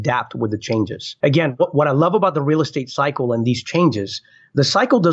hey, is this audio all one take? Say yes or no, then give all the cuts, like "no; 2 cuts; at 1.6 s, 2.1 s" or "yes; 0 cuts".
no; 1 cut; at 1.1 s